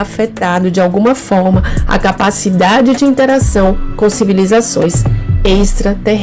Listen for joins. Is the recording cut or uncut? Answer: uncut